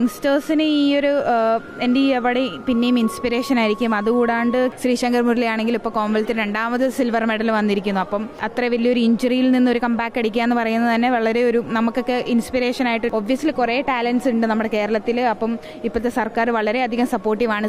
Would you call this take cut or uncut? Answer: cut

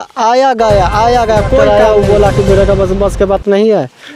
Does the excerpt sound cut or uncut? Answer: cut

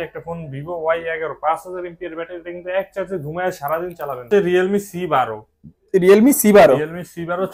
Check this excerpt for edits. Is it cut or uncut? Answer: cut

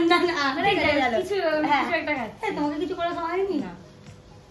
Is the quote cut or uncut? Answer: uncut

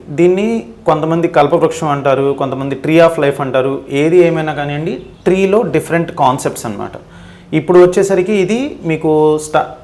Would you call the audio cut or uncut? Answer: uncut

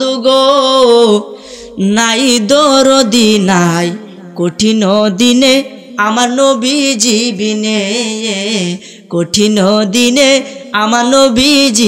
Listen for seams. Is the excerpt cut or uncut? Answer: uncut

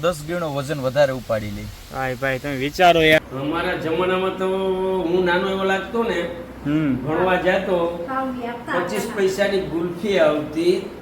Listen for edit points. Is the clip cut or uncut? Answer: cut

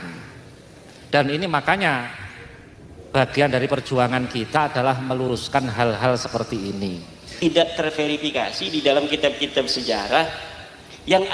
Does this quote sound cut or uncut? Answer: cut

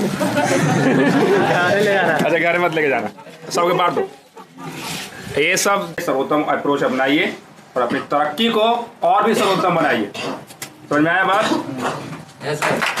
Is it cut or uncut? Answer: cut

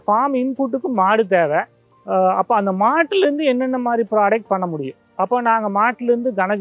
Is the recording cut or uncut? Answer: uncut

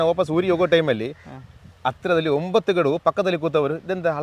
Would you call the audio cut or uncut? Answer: uncut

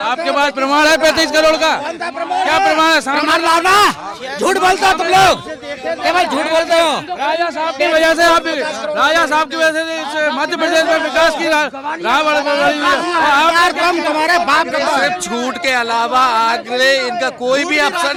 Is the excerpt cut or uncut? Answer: uncut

